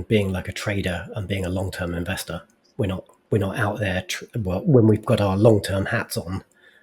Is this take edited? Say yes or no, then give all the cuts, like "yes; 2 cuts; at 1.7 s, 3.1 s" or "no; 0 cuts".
yes; 1 cut; at 2.6 s